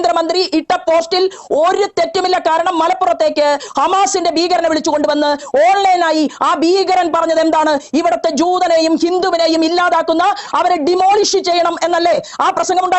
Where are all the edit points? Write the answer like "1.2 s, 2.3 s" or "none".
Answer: none